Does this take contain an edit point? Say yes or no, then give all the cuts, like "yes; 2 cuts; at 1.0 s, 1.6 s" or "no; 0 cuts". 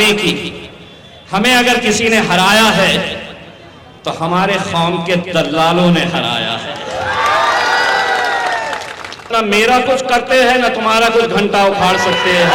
yes; 1 cut; at 9.3 s